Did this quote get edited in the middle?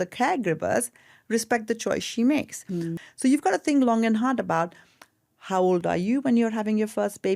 yes; 1 cut; at 2.9 s

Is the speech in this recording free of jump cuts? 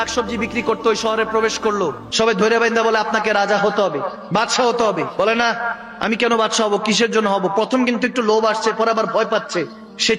no; 1 cut; at 2.0 s

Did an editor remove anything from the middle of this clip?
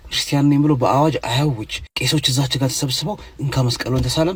no; 0 cuts

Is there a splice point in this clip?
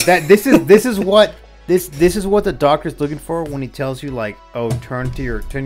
no; 0 cuts

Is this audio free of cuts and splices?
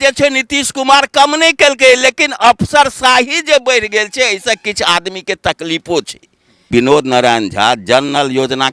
no; 1 cut; at 6.7 s

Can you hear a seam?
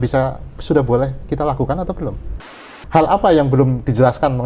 yes; 1 cut; at 2.5 s

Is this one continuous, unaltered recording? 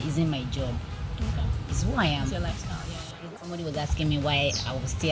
no; 1 cut; at 3.2 s

